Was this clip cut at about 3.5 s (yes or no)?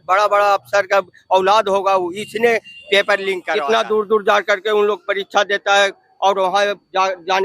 yes